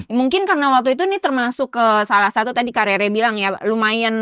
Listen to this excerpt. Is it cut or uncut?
cut